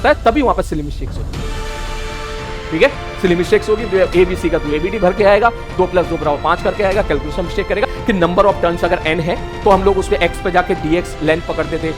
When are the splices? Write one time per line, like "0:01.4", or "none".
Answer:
0:07.9